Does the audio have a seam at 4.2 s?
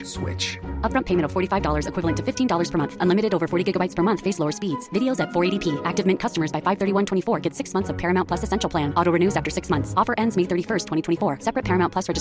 no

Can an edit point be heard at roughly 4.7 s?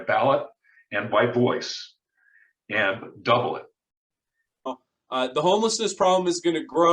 yes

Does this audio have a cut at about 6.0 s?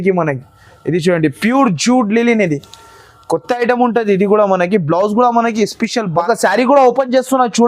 yes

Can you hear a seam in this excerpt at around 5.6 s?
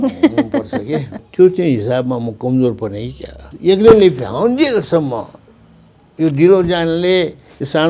no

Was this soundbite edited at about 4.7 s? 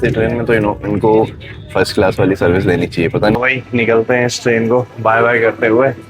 no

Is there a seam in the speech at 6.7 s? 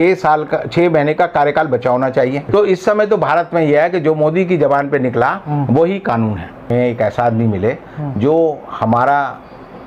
yes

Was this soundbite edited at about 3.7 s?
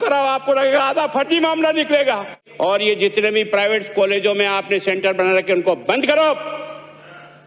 no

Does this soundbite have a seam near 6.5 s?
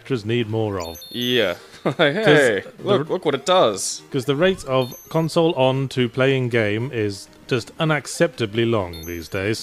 yes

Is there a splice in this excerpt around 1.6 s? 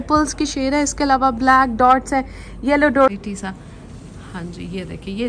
no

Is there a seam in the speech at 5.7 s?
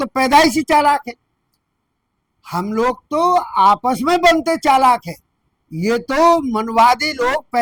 no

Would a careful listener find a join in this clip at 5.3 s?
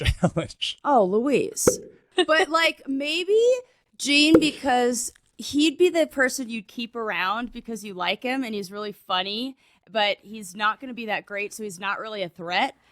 no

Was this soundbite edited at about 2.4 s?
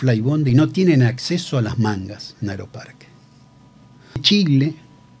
no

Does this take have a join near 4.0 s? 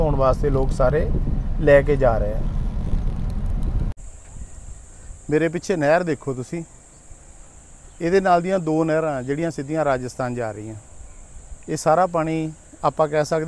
yes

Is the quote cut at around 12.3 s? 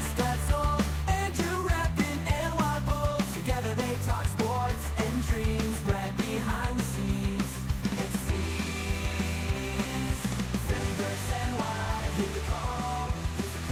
no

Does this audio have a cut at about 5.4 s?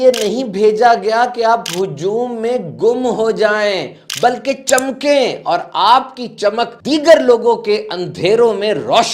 no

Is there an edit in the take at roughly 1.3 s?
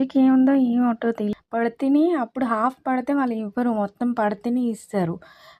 yes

